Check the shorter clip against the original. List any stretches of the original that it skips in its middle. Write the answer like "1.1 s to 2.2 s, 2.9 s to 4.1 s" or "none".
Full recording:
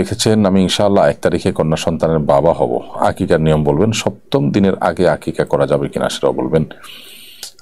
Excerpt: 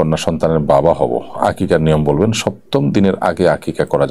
none